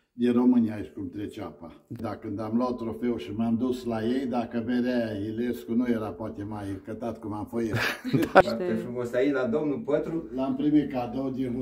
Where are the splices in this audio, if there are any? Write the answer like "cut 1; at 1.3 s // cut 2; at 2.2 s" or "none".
cut 1; at 2.0 s // cut 2; at 8.4 s